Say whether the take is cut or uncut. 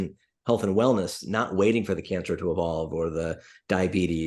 uncut